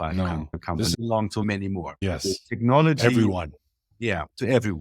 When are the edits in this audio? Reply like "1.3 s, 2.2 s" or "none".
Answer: 0.9 s, 2.0 s